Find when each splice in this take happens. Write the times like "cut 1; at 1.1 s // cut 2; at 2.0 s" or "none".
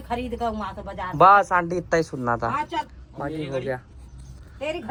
none